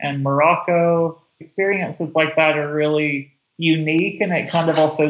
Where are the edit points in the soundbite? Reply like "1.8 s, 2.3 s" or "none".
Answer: 1.4 s